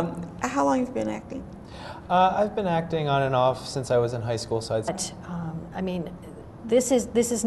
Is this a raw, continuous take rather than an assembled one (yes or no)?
yes